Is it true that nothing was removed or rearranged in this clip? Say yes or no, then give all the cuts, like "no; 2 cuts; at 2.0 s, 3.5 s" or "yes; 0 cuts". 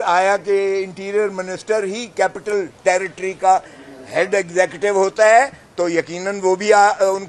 yes; 0 cuts